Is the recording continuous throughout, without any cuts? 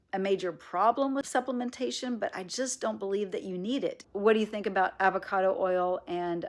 no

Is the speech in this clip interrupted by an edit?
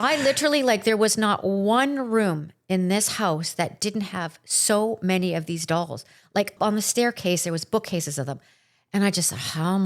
no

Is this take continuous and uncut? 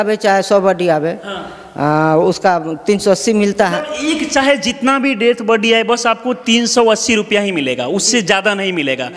yes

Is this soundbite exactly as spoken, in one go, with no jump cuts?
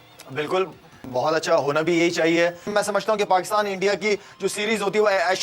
no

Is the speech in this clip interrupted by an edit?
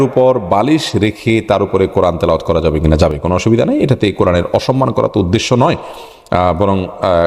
no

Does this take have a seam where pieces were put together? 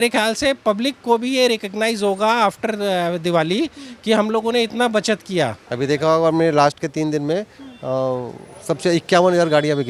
yes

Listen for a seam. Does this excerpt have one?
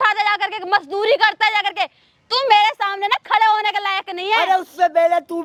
no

